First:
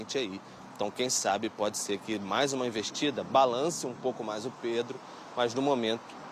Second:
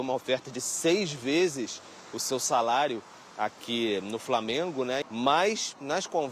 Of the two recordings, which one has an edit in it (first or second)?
second